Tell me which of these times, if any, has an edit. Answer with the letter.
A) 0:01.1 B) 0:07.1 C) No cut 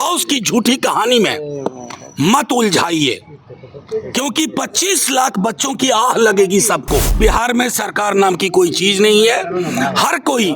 B